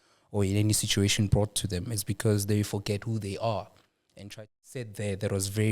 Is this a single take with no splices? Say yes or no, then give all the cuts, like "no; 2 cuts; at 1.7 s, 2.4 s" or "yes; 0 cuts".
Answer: no; 1 cut; at 4.3 s